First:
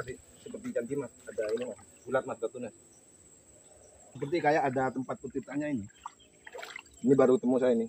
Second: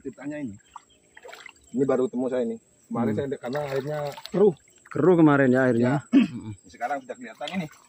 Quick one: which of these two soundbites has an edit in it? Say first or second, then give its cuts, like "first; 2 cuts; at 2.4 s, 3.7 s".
first; 1 cut; at 4.1 s